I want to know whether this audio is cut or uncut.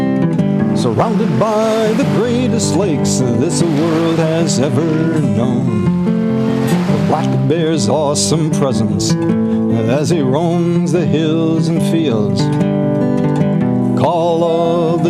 cut